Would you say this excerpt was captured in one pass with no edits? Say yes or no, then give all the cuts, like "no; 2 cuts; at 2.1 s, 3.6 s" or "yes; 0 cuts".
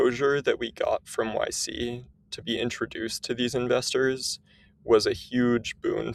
yes; 0 cuts